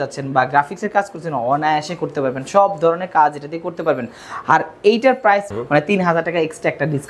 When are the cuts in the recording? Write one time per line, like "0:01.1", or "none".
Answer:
0:05.5